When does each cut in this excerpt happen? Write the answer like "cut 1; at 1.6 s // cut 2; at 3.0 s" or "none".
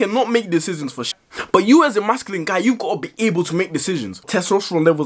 cut 1; at 4.1 s